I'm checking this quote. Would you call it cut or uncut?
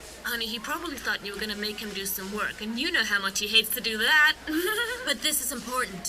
cut